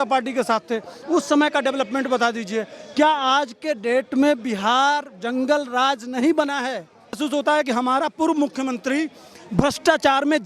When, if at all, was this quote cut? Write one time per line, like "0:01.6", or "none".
0:07.2